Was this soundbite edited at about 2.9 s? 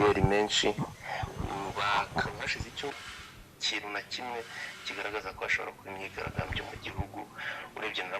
yes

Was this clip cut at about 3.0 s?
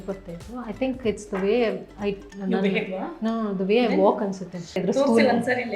no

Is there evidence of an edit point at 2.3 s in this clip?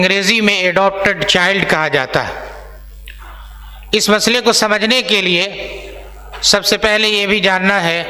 no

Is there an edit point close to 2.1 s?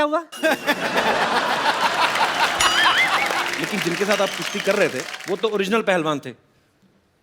no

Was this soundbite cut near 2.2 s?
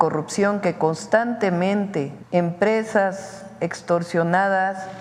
yes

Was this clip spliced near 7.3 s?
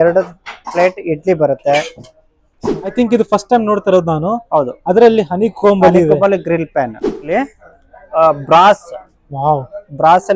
yes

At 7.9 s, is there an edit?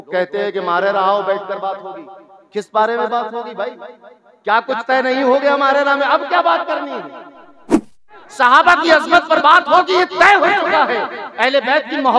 yes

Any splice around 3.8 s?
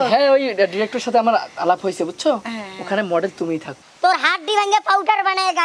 yes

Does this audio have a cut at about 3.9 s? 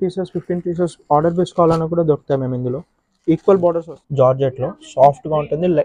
yes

